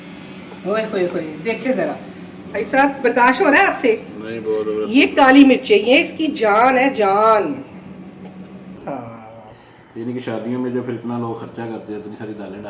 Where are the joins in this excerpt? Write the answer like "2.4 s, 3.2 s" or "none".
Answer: 8.7 s